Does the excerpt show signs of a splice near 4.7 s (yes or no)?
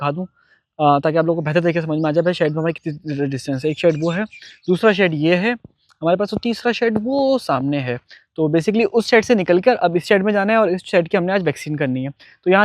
no